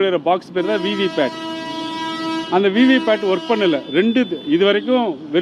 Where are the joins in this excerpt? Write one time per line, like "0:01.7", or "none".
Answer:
none